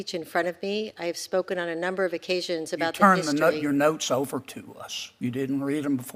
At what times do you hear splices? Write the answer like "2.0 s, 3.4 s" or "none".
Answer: none